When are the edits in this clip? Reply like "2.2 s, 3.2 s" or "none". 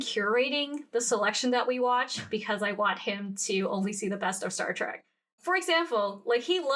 5.3 s